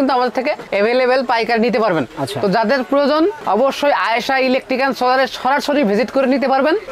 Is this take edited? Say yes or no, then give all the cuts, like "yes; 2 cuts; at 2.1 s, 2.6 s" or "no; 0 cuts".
no; 0 cuts